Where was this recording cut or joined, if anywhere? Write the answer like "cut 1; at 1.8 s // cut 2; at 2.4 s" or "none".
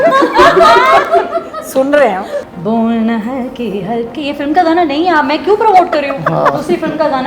cut 1; at 2.4 s